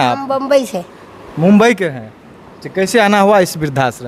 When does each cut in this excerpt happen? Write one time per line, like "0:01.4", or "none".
none